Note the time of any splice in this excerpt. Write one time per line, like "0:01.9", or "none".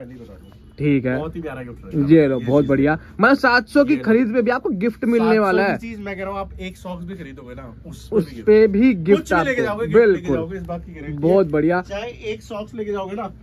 none